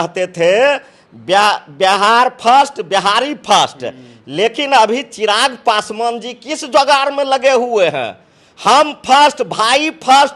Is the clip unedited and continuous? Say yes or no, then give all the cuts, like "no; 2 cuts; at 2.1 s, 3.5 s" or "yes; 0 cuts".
yes; 0 cuts